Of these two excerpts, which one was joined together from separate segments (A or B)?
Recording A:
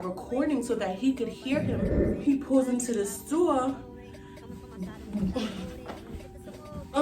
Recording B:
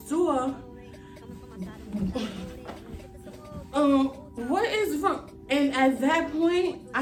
A